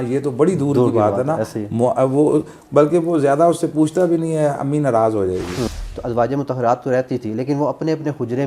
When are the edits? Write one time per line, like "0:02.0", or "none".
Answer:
0:05.8